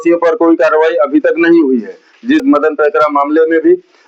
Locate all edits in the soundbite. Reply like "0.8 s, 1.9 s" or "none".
2.4 s